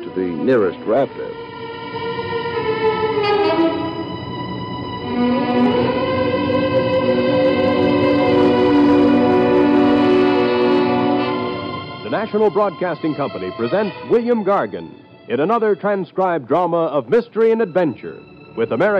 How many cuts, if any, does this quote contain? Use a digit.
1